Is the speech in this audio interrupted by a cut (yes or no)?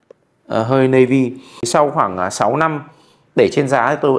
yes